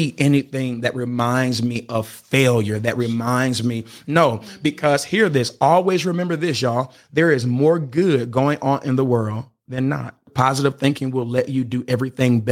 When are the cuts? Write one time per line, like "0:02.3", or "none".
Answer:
0:07.0
0:10.3